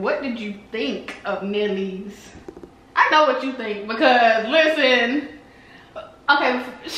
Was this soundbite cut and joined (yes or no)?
no